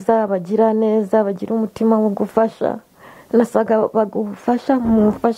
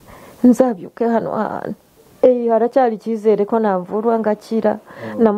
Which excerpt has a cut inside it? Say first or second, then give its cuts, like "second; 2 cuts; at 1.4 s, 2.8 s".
second; 1 cut; at 2.0 s